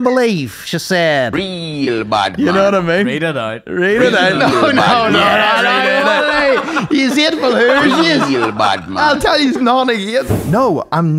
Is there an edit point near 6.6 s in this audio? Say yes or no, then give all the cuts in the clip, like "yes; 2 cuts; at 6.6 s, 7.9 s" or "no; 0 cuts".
no; 1 cut; at 10.3 s